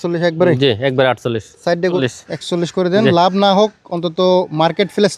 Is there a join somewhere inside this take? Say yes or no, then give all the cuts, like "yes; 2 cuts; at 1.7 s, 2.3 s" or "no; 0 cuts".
yes; 1 cut; at 2.0 s